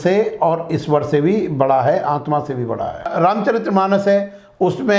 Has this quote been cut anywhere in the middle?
yes; 1 cut; at 3.1 s

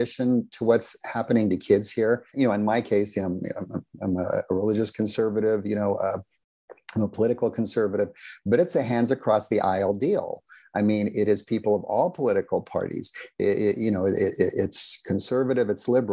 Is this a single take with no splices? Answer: no; 1 cut; at 2.3 s

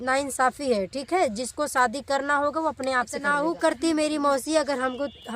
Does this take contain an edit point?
yes; 1 cut; at 3.3 s

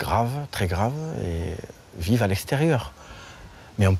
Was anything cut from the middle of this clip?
no; 0 cuts

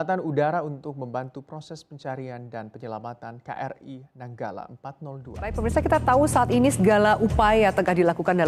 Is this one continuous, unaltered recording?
no; 1 cut; at 5.5 s

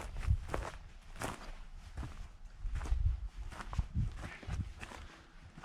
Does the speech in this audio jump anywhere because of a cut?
no; 0 cuts

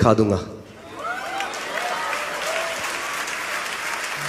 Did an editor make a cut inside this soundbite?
no; 0 cuts

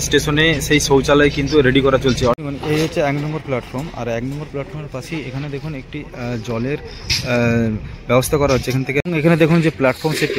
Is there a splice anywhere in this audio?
yes; 2 cuts; at 2.4 s, 9.0 s

